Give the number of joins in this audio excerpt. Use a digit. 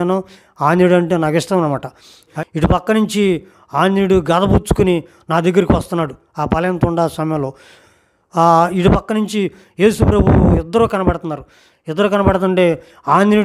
2